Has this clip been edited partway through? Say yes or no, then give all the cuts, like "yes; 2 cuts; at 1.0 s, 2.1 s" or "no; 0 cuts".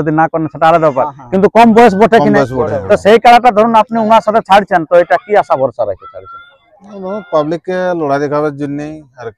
no; 0 cuts